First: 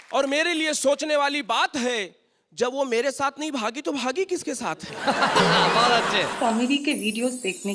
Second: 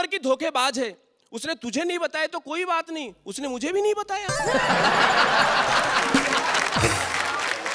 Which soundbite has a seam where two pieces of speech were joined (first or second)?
first